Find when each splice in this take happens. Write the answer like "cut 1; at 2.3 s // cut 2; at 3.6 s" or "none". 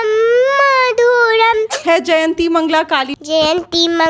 cut 1; at 1.7 s // cut 2; at 3.1 s